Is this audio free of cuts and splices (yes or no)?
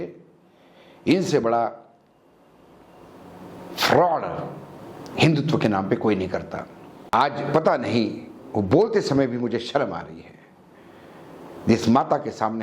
no